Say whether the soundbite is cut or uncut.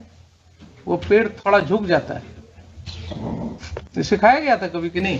cut